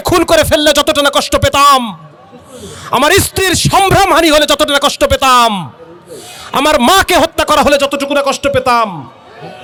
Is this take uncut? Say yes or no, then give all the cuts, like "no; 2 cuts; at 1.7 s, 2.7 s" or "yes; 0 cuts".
yes; 0 cuts